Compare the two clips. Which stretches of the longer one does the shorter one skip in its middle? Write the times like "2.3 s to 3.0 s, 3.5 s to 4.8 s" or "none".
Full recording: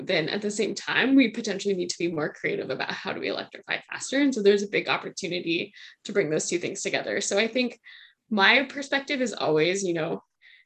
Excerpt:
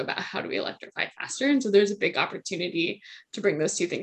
none